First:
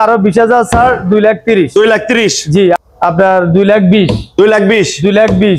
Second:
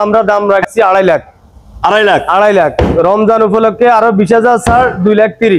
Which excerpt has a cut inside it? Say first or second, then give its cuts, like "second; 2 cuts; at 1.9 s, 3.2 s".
first; 1 cut; at 2.8 s